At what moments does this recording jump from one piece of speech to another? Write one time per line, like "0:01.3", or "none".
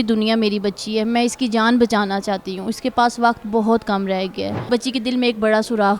0:04.7